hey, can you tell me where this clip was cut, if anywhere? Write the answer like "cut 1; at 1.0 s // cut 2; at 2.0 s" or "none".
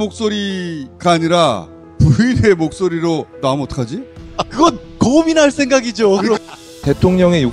cut 1; at 6.4 s